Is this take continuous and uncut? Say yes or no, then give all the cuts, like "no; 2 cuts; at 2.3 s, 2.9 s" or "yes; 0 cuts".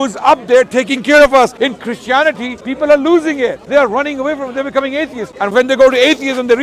no; 4 cuts; at 1.5 s, 2.6 s, 3.6 s, 5.5 s